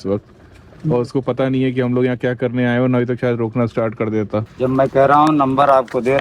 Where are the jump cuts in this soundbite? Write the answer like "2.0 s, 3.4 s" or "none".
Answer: 4.5 s